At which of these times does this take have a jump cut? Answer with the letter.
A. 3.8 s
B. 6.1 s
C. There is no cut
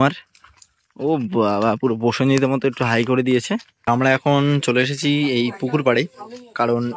A